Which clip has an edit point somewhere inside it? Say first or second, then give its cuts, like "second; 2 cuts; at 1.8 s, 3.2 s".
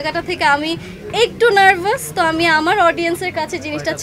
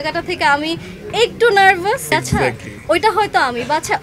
second; 1 cut; at 2.1 s